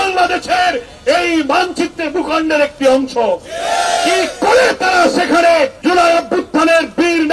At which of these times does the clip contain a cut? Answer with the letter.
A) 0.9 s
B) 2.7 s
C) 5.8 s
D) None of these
C